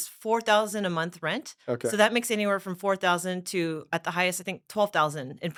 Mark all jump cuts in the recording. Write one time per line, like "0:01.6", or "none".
none